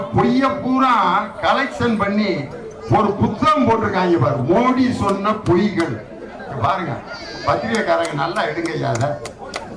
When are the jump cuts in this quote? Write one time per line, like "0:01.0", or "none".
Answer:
none